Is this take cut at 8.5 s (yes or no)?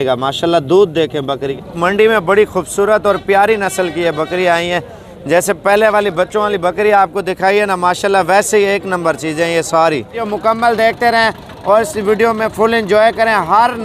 no